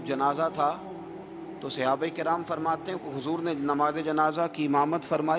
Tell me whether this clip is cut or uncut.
uncut